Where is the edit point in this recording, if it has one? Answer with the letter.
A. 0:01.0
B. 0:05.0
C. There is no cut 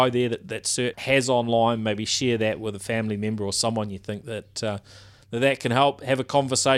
A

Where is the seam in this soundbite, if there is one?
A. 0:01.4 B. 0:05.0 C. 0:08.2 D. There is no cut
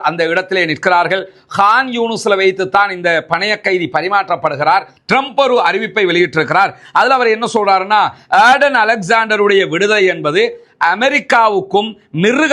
B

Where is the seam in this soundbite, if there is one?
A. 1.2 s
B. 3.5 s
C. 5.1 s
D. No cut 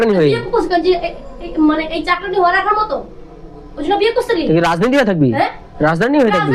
D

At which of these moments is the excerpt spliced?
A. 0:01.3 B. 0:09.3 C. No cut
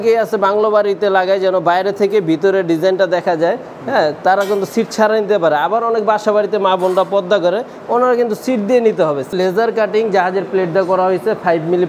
B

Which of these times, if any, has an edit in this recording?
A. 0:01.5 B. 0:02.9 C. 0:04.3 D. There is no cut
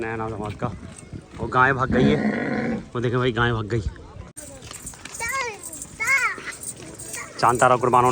C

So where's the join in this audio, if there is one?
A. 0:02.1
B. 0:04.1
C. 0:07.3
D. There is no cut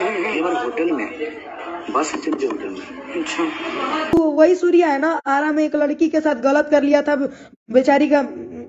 B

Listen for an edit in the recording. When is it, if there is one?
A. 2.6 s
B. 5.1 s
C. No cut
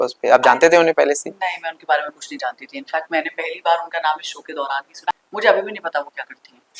B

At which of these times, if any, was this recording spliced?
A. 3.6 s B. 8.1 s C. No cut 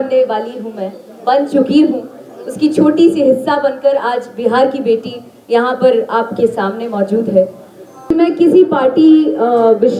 B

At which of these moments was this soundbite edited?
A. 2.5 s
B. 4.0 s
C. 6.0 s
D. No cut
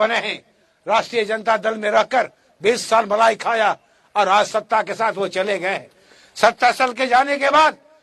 D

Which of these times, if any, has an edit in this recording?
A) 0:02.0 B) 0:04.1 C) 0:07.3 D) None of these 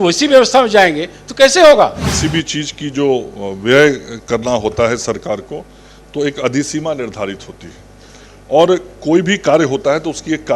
A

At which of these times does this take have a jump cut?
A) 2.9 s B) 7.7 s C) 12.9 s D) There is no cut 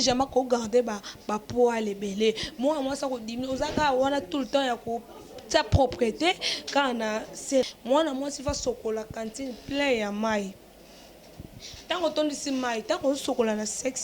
B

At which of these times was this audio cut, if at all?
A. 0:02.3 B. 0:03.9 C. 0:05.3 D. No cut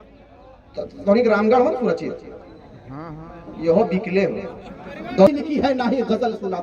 C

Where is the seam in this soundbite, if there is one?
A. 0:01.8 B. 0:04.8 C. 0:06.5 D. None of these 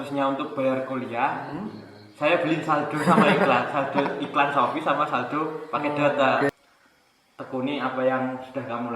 C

